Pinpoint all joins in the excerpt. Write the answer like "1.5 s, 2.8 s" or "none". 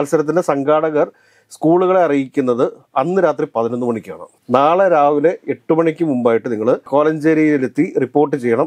none